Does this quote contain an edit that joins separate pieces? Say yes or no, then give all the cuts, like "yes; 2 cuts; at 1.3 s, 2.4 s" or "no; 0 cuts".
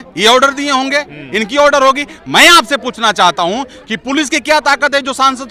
no; 0 cuts